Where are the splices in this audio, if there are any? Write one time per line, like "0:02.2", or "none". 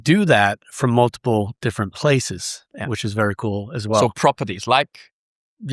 none

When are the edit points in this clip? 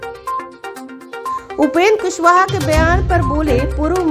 0:01.1

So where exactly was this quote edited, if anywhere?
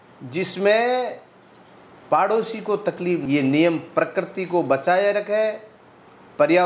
0:03.2

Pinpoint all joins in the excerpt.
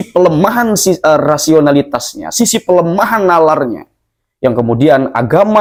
none

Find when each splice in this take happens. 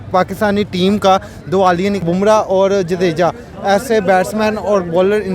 0:02.4

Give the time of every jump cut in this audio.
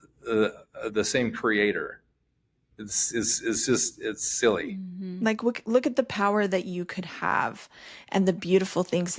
none

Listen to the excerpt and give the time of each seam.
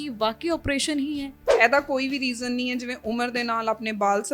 0:01.4

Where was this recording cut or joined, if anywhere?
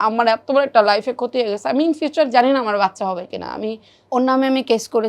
0:03.9

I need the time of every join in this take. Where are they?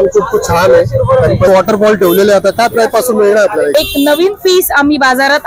0:01.5
0:03.7

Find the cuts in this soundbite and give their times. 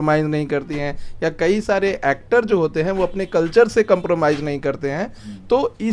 none

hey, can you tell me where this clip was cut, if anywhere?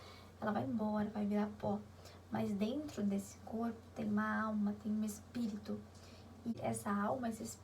0:06.4

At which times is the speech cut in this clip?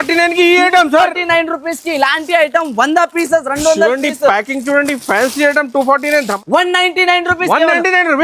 0:06.3

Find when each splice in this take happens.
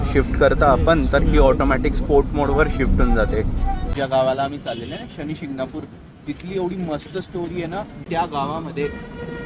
0:03.9
0:08.0

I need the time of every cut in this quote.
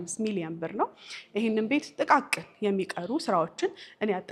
none

